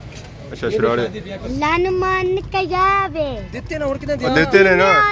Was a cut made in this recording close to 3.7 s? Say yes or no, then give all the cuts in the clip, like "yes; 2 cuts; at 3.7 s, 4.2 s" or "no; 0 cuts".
no; 1 cut; at 1.4 s